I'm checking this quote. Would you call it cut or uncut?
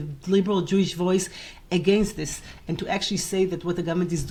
uncut